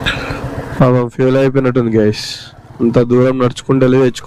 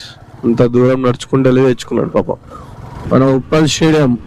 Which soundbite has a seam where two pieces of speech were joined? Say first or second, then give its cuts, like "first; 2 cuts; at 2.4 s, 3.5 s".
second; 1 cut; at 3.1 s